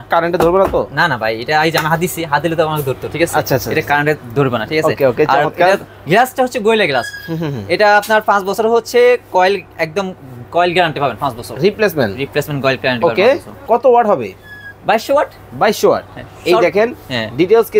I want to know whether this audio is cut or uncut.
cut